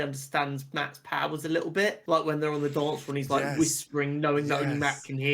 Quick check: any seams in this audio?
yes; 1 cut; at 2.0 s

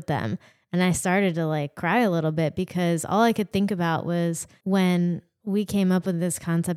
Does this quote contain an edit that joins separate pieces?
yes; 1 cut; at 4.5 s

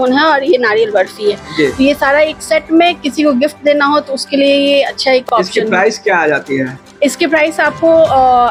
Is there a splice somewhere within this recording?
no; 0 cuts

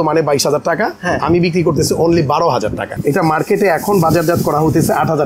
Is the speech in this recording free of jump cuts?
no; 1 cut; at 3.0 s

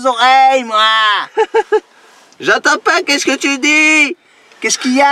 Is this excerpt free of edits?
yes; 0 cuts

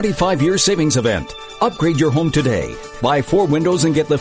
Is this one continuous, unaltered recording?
yes; 0 cuts

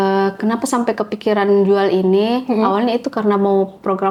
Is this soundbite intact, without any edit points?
yes; 0 cuts

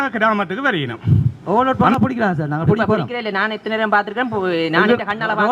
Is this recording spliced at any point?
yes; 1 cut; at 1.4 s

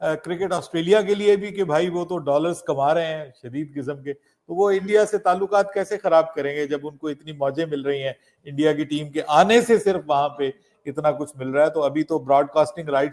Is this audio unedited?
yes; 0 cuts

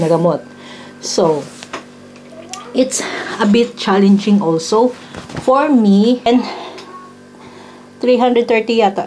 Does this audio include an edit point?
yes; 1 cut; at 6.3 s

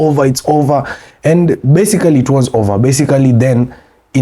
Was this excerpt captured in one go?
yes; 0 cuts

